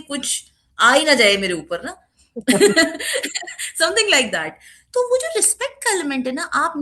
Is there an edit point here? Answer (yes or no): no